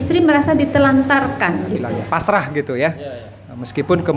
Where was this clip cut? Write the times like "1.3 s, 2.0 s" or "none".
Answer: 2.0 s

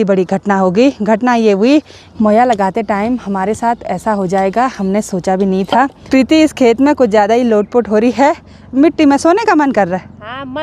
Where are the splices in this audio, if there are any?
2.0 s, 6.0 s

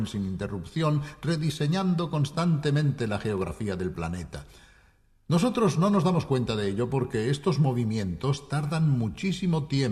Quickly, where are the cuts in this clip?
1.1 s

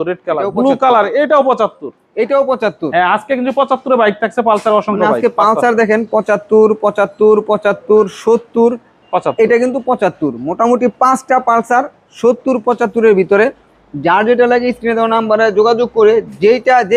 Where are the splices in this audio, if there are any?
none

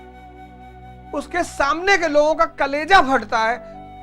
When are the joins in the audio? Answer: 1.1 s

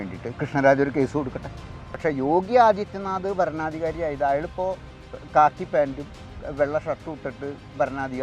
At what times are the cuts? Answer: 2.0 s

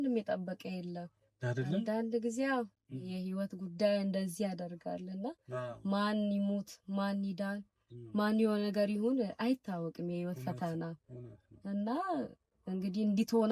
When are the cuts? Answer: none

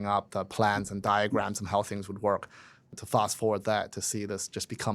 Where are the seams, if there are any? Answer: 2.9 s

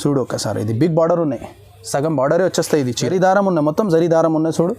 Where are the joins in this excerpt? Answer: 3.1 s

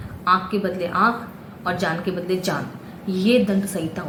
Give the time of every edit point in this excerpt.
none

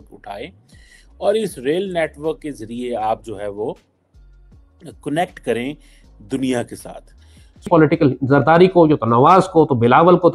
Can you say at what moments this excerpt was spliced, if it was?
7.6 s

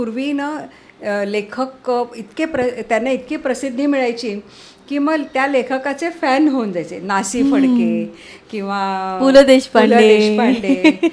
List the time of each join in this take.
none

